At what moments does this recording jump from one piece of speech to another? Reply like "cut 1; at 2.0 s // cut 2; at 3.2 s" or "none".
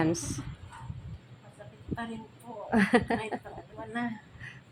none